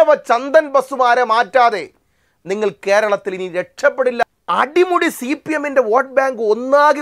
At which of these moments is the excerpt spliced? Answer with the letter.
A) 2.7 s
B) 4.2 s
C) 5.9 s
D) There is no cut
B